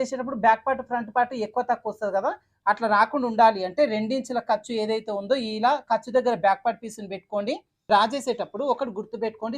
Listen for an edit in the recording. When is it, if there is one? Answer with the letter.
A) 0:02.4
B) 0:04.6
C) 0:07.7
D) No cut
C